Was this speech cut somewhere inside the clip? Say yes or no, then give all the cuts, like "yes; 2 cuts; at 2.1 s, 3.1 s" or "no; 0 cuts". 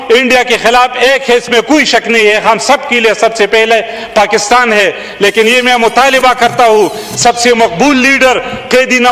no; 0 cuts